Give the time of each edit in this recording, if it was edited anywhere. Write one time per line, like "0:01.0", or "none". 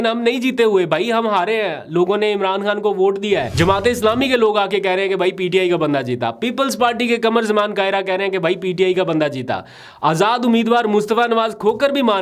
0:03.5